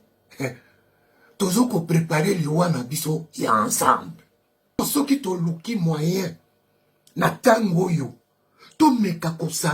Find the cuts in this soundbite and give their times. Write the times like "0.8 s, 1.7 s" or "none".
4.8 s